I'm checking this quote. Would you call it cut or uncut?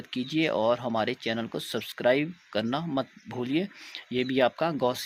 uncut